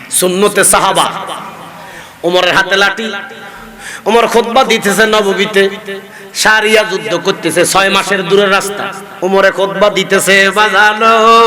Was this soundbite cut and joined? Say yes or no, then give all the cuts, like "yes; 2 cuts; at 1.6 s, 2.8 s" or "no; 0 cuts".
yes; 1 cut; at 9.0 s